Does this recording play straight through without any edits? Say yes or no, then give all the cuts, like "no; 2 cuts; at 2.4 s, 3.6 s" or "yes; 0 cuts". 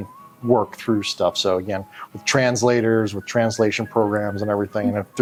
yes; 0 cuts